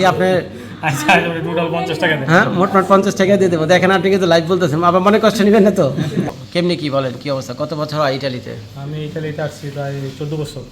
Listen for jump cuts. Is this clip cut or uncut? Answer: cut